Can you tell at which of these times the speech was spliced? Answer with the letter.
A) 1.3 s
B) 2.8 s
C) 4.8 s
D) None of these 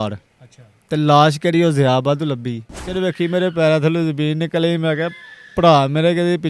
B